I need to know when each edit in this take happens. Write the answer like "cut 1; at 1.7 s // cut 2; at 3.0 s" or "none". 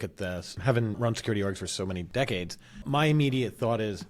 cut 1; at 1.0 s // cut 2; at 2.1 s // cut 3; at 2.8 s